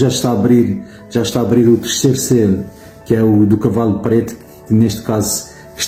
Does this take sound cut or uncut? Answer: uncut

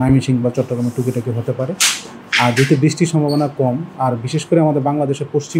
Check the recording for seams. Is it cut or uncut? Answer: uncut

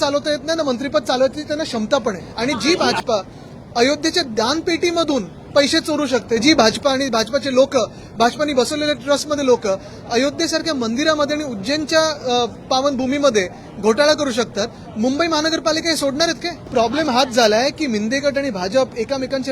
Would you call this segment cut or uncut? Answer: cut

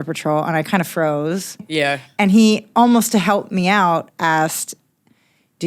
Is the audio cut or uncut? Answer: cut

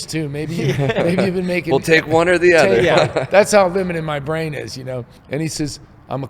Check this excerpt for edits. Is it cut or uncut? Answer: cut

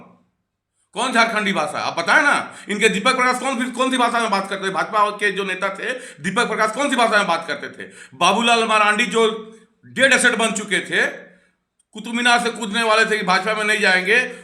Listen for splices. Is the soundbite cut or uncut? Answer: uncut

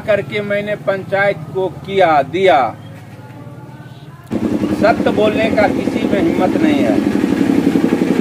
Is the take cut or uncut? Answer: cut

